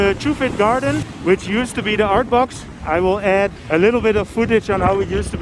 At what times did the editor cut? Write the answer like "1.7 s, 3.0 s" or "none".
1.1 s, 3.6 s

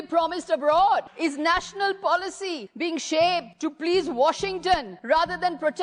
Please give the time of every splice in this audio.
1.1 s, 2.6 s, 3.5 s, 4.9 s

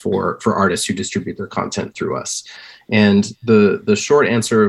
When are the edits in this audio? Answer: none

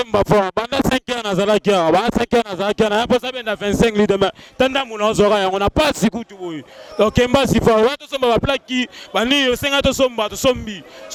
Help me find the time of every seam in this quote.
none

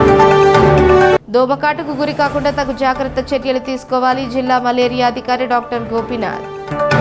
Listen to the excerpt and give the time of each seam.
none

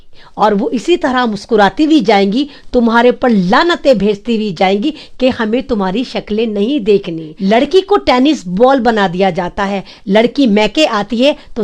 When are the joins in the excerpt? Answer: 7.2 s

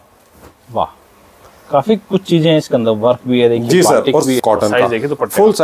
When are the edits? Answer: 4.4 s

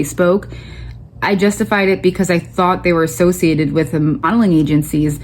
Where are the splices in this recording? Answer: 4.3 s

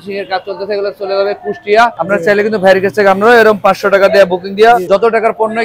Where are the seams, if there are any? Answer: none

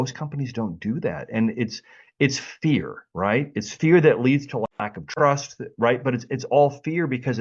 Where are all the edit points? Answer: none

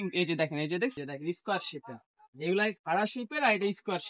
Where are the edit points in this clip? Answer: 1.0 s

